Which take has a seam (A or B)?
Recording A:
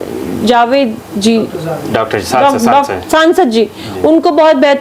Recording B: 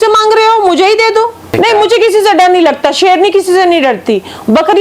B